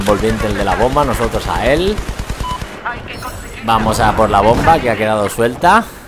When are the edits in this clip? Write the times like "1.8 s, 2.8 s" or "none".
none